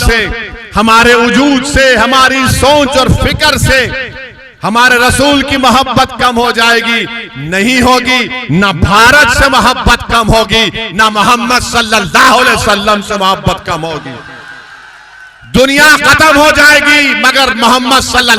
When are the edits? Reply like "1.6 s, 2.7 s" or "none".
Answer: none